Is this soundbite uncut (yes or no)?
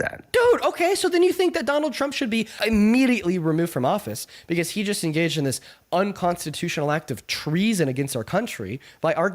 no